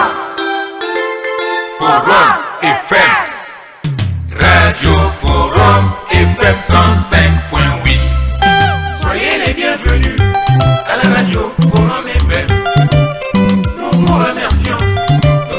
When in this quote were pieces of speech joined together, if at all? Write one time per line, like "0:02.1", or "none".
none